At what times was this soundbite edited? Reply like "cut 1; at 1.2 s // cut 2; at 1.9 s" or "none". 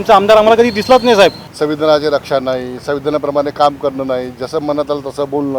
cut 1; at 1.5 s